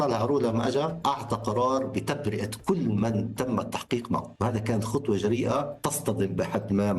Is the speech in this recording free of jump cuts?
no; 3 cuts; at 1.0 s, 4.3 s, 5.8 s

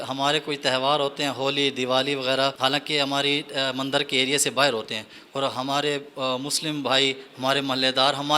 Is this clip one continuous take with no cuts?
no; 1 cut; at 2.5 s

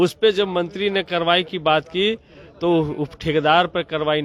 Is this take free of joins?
yes; 0 cuts

